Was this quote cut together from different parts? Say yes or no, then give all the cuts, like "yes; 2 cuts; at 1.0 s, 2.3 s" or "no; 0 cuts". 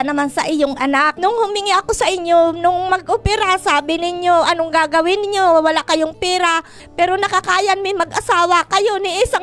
yes; 2 cuts; at 1.1 s, 6.8 s